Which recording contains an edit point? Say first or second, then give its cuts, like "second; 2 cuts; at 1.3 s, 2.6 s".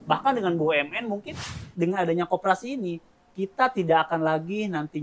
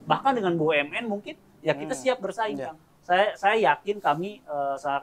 first; 1 cut; at 1.6 s